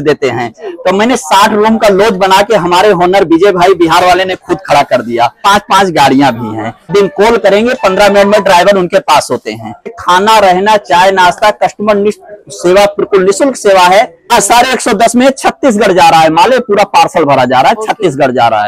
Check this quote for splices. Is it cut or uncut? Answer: cut